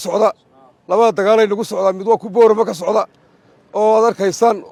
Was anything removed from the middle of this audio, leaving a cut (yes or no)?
no